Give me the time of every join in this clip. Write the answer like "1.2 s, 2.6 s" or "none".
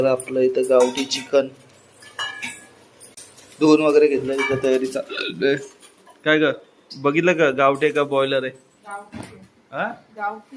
3.1 s